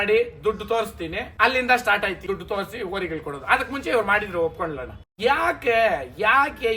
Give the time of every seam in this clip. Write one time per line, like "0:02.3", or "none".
0:01.2
0:02.2
0:05.1